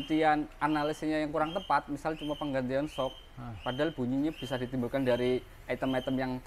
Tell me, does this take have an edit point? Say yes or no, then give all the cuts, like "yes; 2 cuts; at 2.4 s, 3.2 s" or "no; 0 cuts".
no; 0 cuts